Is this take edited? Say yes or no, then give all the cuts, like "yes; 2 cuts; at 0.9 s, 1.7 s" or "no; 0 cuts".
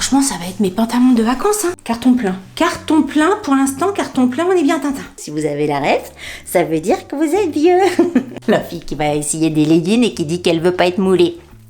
yes; 3 cuts; at 1.8 s, 5.1 s, 8.3 s